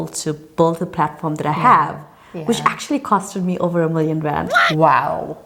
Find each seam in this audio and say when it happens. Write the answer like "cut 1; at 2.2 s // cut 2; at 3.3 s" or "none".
none